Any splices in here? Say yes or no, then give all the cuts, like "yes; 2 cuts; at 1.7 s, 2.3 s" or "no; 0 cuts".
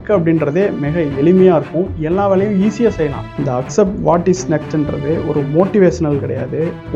yes; 1 cut; at 3.3 s